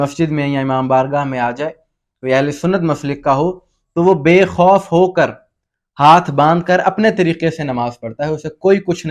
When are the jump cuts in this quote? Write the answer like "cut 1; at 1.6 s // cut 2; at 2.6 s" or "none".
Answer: none

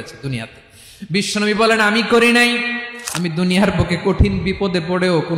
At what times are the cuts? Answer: cut 1; at 2.9 s

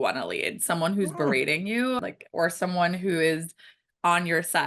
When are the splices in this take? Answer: cut 1; at 2.0 s

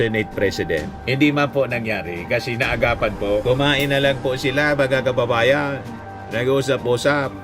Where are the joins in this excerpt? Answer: cut 1; at 3.4 s

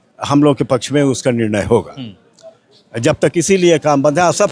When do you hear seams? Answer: none

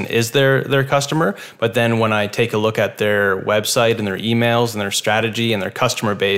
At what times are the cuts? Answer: none

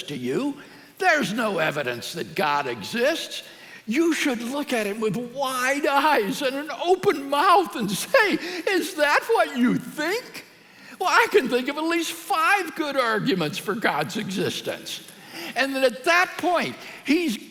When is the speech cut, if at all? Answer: none

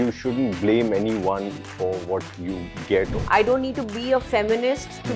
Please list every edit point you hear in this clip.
cut 1; at 3.2 s

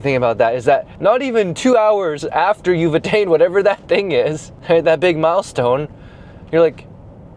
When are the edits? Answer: cut 1; at 0.9 s // cut 2; at 4.5 s

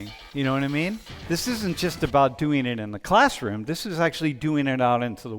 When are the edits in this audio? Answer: cut 1; at 1.0 s

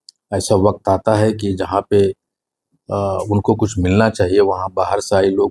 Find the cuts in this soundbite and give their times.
none

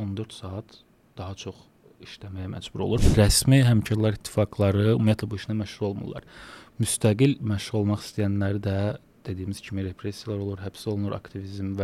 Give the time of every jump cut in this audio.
cut 1; at 3.0 s

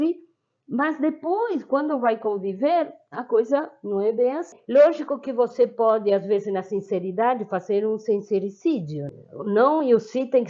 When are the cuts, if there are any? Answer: cut 1; at 4.6 s // cut 2; at 9.0 s

